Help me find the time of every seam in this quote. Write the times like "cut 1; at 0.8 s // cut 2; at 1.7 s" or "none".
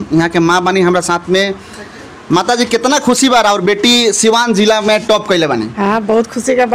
none